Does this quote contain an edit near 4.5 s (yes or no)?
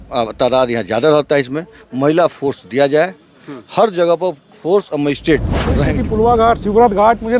no